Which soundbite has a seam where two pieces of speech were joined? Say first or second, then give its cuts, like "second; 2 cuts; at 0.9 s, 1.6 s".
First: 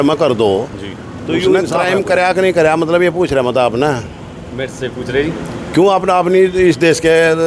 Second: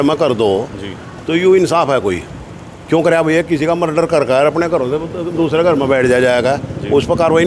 first; 1 cut; at 1.7 s